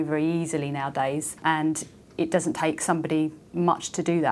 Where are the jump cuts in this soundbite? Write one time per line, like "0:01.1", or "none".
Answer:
0:01.4
0:03.4